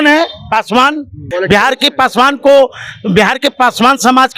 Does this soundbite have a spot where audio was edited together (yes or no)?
yes